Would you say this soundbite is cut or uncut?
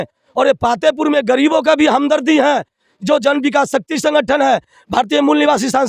uncut